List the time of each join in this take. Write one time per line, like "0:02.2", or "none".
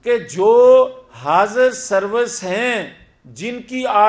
none